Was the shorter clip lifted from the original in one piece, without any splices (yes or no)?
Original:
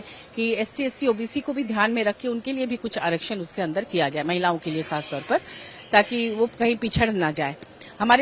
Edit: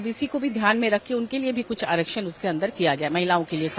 yes